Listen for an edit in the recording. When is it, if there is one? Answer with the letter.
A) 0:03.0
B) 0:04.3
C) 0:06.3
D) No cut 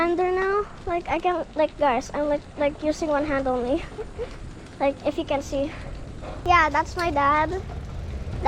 C